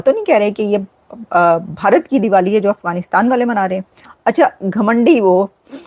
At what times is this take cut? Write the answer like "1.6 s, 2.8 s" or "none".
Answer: 3.9 s